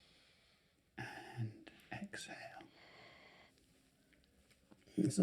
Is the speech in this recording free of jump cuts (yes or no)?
no